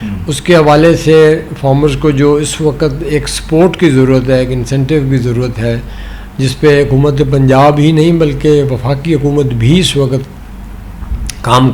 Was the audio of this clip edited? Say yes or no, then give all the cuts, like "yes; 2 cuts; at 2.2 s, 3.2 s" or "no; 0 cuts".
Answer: no; 0 cuts